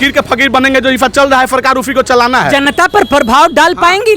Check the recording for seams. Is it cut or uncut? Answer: uncut